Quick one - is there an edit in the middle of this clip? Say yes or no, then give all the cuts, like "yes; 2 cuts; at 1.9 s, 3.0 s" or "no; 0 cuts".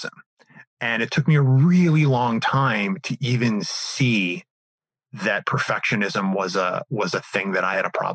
no; 0 cuts